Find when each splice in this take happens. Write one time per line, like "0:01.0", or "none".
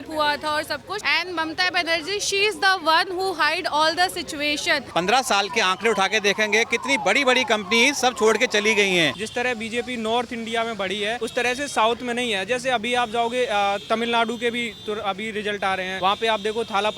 0:01.0
0:04.8
0:09.2
0:11.2
0:15.9

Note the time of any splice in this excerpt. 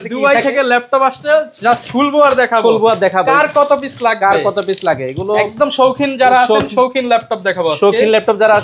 none

